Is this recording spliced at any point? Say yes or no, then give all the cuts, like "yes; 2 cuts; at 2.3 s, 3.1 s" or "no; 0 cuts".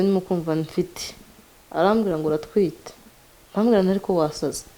no; 0 cuts